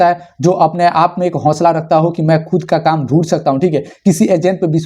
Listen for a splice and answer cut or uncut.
uncut